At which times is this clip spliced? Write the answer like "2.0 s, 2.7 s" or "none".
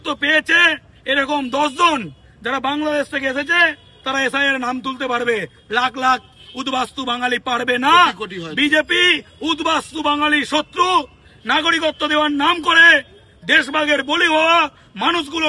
none